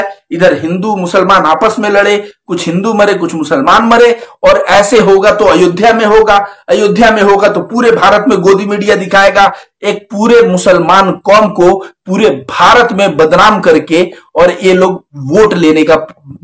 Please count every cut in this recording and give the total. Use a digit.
1